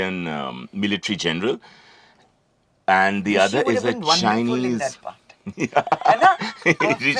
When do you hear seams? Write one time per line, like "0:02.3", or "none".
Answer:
none